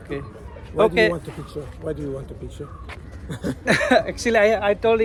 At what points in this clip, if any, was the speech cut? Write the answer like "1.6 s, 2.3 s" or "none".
none